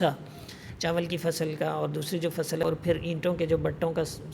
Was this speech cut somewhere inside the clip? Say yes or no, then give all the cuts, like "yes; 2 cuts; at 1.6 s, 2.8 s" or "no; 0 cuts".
yes; 1 cut; at 2.7 s